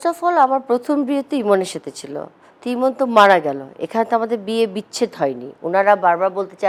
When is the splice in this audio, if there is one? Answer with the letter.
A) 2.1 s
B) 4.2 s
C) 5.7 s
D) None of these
D